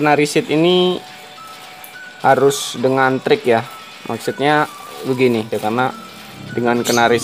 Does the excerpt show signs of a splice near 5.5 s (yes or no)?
yes